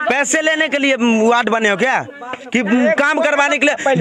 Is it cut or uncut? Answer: uncut